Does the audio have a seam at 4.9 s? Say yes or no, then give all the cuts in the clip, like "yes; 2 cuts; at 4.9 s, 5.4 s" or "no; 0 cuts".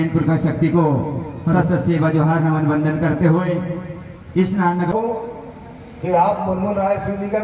yes; 1 cut; at 4.9 s